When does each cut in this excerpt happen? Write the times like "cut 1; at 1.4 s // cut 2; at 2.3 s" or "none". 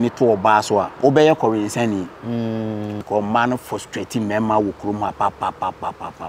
cut 1; at 1.0 s // cut 2; at 3.0 s